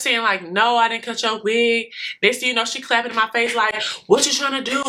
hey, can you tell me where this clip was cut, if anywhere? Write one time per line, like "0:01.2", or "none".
none